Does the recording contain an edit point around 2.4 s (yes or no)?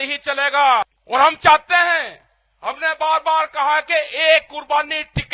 no